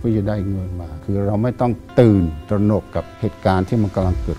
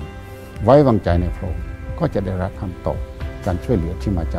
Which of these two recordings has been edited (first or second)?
first